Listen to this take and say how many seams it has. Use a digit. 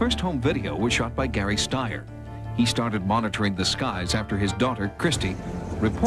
1